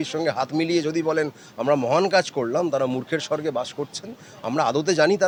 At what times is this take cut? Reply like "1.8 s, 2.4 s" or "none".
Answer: none